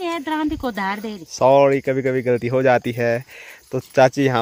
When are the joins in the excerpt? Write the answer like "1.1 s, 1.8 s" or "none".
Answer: none